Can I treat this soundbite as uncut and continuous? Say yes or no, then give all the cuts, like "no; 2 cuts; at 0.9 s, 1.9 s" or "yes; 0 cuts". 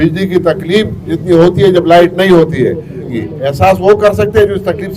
no; 1 cut; at 3.1 s